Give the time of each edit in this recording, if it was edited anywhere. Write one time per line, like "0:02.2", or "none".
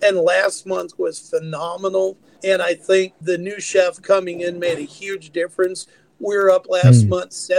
0:02.3
0:03.2